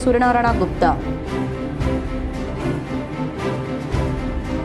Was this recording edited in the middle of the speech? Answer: no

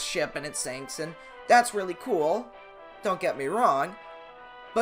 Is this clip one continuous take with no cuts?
yes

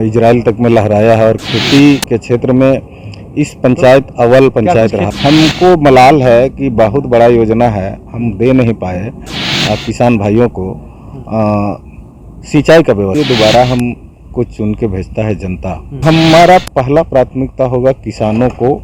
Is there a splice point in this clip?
yes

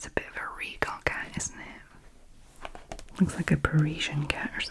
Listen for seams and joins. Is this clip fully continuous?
yes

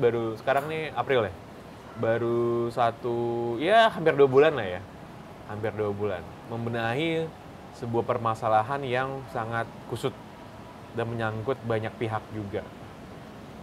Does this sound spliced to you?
no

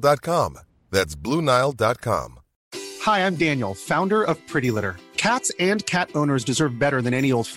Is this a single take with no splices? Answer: no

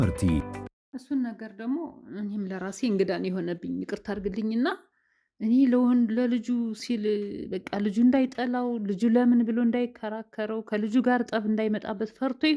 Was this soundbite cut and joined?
yes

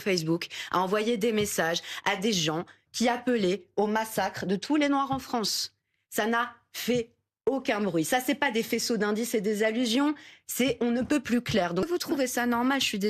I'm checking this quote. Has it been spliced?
yes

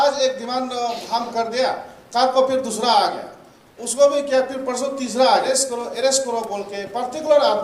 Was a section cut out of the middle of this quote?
yes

